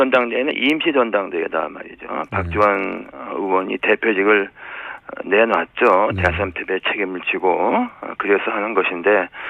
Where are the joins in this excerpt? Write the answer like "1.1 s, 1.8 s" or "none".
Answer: 1.6 s